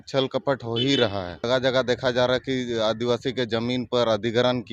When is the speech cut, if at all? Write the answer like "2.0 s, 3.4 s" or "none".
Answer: 1.4 s

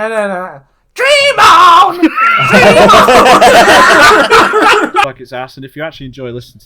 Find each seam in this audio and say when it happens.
5.0 s

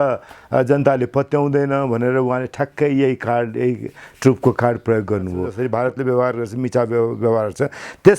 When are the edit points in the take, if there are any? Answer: 5.5 s

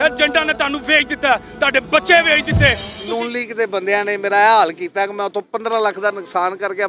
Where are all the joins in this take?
2.9 s

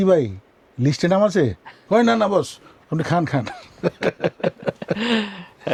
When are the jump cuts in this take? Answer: none

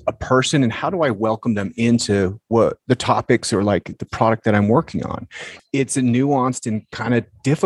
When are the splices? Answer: 2.8 s, 3.9 s, 5.5 s

